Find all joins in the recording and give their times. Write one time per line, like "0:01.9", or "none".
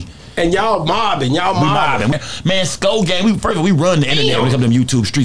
0:02.1